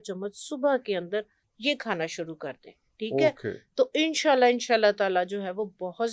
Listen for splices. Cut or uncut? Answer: uncut